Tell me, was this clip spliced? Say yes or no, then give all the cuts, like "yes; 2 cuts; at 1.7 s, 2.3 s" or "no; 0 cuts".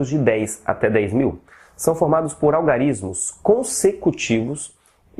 yes; 1 cut; at 1.1 s